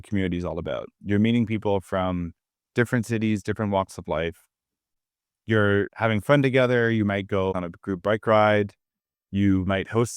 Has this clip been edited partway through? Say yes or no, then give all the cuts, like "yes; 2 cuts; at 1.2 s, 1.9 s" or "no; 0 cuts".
yes; 2 cuts; at 4.9 s, 7.5 s